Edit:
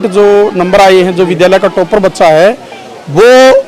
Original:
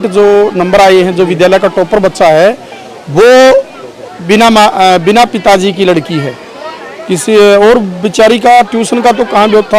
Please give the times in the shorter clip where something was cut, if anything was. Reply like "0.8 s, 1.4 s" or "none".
none